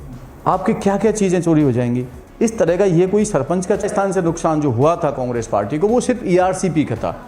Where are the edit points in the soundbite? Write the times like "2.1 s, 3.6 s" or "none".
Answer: 3.8 s